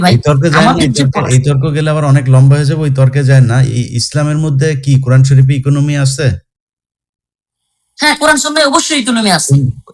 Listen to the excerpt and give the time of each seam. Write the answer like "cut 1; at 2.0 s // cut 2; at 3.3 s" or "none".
none